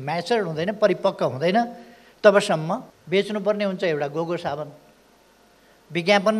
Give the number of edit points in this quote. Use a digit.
1